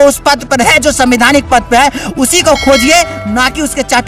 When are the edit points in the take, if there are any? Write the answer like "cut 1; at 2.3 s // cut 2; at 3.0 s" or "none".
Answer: none

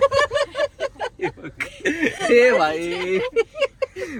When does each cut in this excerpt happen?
none

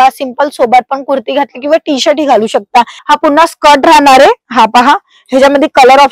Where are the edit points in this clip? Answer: cut 1; at 3.0 s

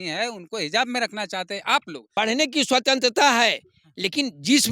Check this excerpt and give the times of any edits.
cut 1; at 2.0 s

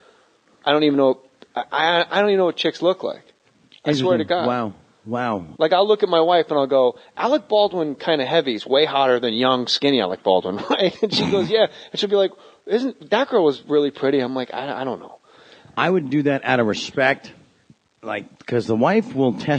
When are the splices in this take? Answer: cut 1; at 12.5 s

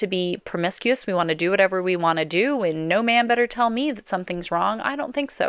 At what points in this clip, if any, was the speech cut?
none

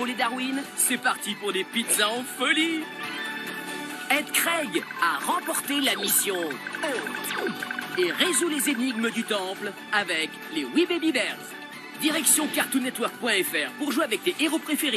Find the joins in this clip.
none

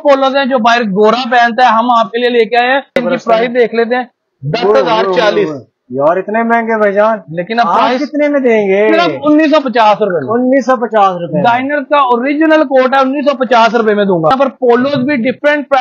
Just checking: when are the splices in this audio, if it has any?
cut 1; at 3.0 s // cut 2; at 14.3 s

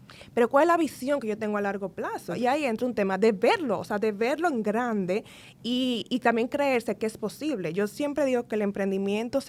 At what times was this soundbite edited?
none

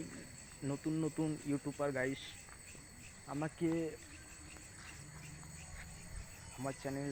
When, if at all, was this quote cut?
none

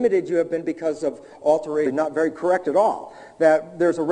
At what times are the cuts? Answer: none

